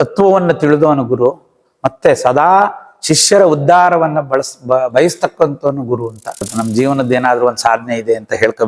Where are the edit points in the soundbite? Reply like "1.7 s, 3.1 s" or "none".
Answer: 6.5 s